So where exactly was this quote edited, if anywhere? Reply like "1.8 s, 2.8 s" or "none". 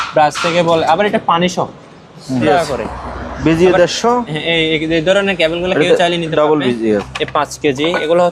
2.4 s, 7.2 s

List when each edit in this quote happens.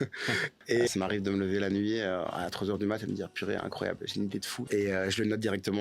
0.9 s, 4.7 s

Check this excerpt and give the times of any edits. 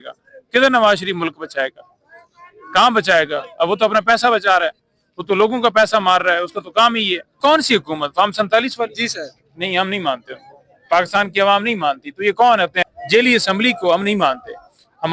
7.4 s, 12.8 s

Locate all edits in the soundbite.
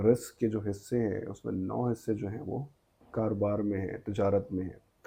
none

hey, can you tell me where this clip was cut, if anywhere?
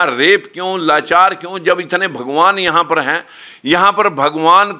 none

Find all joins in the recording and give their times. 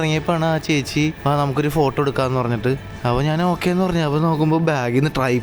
1.2 s, 2.9 s

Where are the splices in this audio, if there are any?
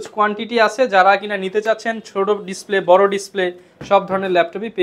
none

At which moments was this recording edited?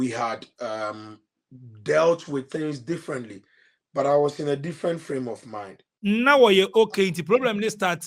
5.9 s

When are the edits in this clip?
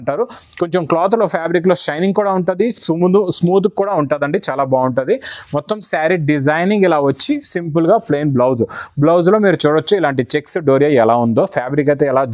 none

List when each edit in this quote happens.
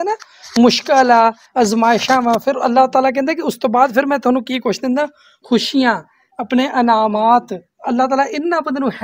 none

